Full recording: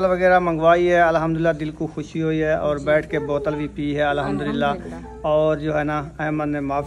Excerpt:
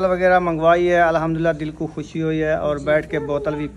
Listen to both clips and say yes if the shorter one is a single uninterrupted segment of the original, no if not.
yes